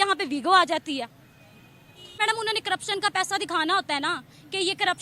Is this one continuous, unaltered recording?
no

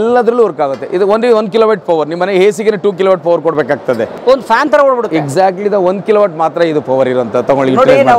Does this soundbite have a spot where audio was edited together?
no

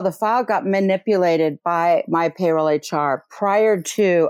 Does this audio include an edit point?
no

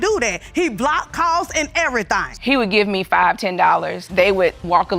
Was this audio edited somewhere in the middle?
yes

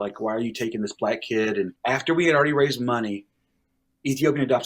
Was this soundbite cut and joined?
yes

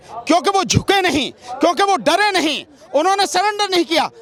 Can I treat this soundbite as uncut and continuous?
yes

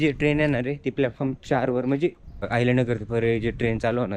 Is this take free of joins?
no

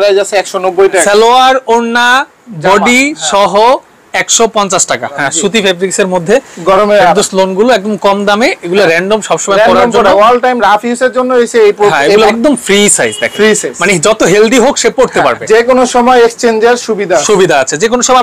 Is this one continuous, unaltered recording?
no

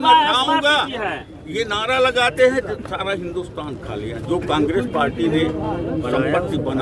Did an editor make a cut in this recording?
no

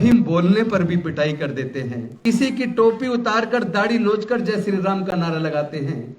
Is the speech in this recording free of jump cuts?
no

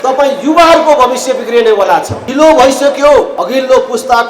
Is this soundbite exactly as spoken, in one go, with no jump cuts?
no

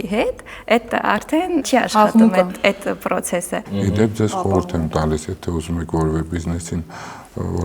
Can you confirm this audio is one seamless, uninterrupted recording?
no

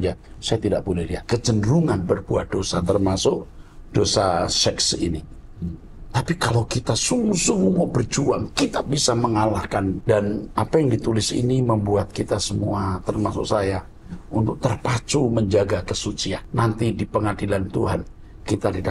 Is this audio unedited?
no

